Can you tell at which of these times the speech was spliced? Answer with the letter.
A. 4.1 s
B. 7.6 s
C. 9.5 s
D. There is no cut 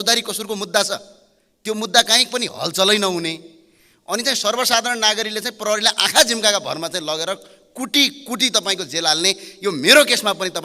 D